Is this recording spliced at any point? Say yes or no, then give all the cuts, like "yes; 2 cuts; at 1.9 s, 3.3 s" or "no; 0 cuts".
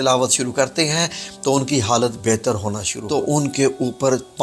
yes; 1 cut; at 2.9 s